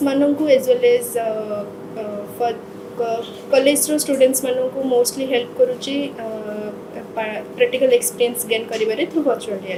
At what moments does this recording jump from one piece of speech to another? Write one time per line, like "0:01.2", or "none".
none

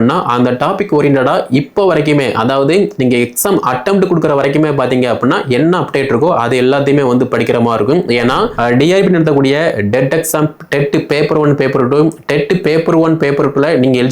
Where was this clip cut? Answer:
0:08.5

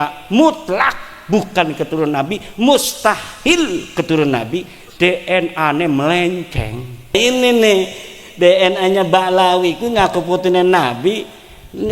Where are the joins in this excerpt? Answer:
0:07.1

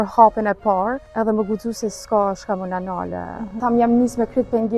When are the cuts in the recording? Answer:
0:01.0
0:03.6

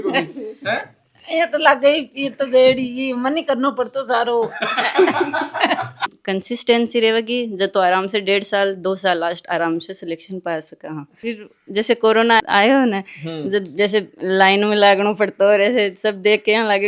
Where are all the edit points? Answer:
0:06.2
0:11.1

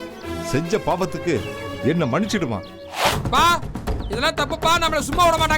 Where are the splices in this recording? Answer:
0:03.1

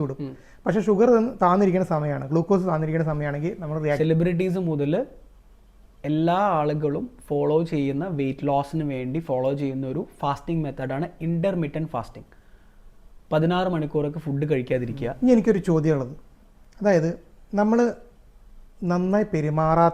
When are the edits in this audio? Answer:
0:04.0
0:15.2

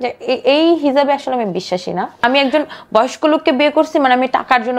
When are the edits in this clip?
0:02.2

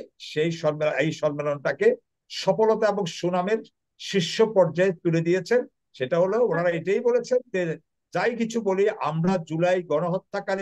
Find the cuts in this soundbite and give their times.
none

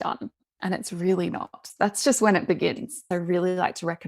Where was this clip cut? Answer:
0:01.7
0:03.0

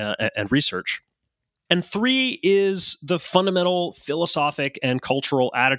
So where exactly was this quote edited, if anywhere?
none

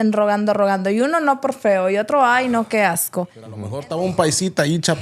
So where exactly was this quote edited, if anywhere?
0:03.8

